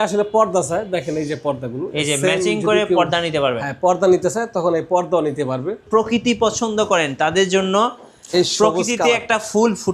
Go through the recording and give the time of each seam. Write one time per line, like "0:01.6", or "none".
0:05.8